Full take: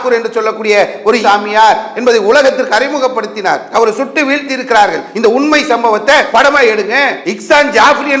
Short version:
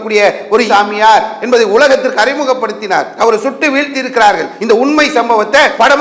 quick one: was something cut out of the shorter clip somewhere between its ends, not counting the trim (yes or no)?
no